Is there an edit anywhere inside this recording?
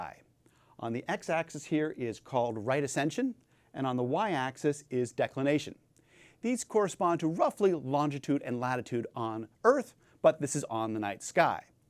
no; 0 cuts

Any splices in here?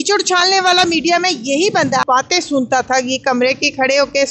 yes; 1 cut; at 2.0 s

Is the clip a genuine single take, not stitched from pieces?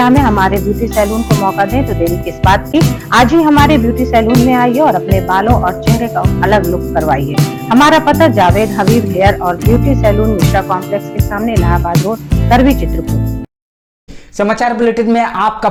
yes; 0 cuts

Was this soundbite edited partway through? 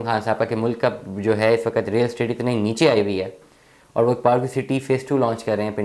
no; 0 cuts

